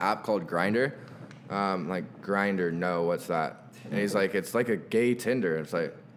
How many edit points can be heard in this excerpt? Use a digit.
0